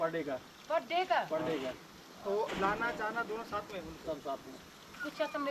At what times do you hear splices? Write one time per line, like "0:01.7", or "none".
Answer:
none